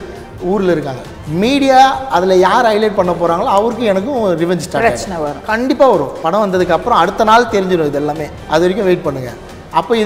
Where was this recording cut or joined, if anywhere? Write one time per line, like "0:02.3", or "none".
0:01.0
0:06.2
0:08.3